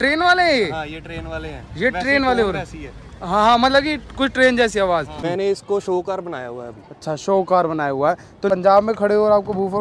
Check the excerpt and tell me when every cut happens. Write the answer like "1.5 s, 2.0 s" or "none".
5.2 s, 8.5 s

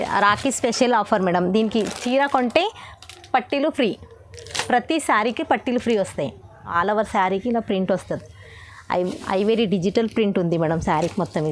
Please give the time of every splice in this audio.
6.8 s

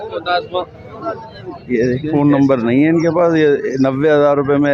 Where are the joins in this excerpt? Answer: 2.1 s

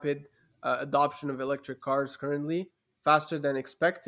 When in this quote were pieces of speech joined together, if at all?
none

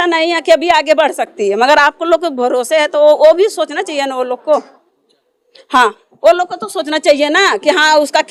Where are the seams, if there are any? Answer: none

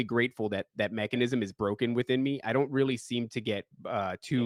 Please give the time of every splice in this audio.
none

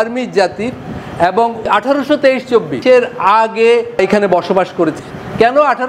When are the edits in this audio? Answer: 1.6 s, 2.7 s, 4.0 s, 5.0 s

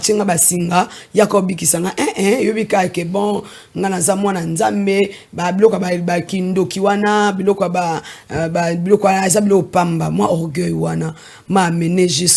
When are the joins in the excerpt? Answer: none

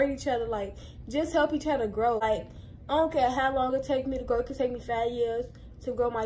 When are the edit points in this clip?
2.2 s

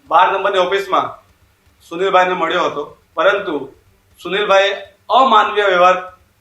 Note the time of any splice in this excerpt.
3.0 s

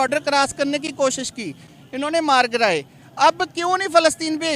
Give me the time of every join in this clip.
none

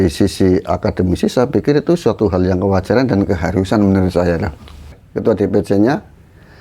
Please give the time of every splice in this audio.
5.0 s

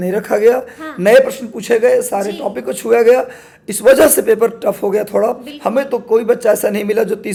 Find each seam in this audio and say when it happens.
none

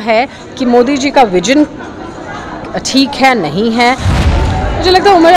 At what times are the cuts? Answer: 4.1 s

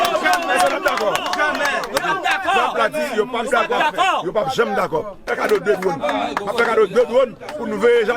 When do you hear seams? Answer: 5.2 s

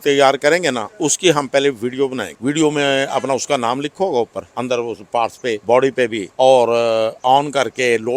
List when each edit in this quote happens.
2.3 s, 4.4 s, 5.6 s, 6.2 s

